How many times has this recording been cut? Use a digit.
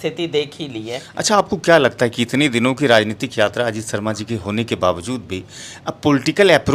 1